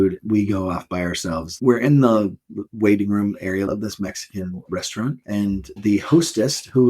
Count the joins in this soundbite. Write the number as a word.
three